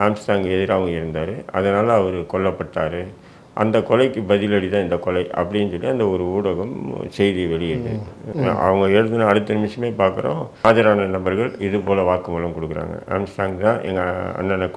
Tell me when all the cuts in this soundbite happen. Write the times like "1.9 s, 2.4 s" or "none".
8.2 s, 10.6 s